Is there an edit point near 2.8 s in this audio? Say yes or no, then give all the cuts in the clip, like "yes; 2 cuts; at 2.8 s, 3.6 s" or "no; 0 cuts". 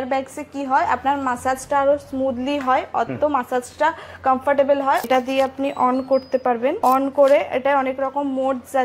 no; 2 cuts; at 5.1 s, 6.8 s